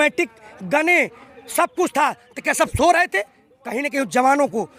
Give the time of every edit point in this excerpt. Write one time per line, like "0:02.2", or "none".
none